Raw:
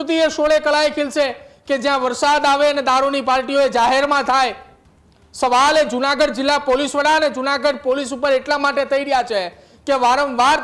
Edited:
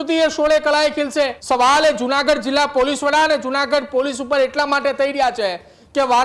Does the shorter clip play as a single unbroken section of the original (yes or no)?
no